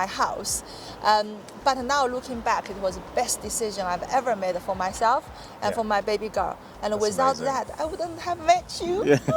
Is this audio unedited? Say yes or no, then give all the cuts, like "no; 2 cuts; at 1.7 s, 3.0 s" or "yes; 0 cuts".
yes; 0 cuts